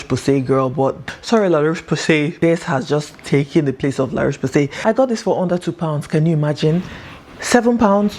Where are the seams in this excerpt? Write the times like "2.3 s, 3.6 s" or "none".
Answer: 1.0 s, 2.3 s, 4.7 s